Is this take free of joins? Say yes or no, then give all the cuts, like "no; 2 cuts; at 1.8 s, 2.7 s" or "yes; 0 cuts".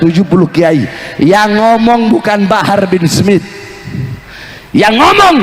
yes; 0 cuts